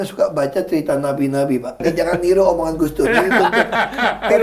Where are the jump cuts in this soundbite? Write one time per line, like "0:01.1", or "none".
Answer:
0:01.8